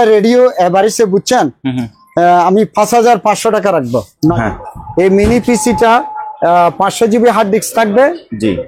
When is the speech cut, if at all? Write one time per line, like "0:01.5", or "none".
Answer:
0:04.3